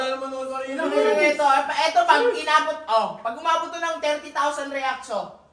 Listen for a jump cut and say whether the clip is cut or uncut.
uncut